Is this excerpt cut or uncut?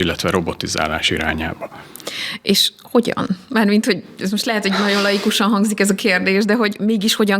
uncut